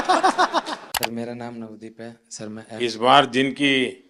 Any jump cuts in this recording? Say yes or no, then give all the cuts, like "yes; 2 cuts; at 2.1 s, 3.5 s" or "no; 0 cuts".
yes; 1 cut; at 0.9 s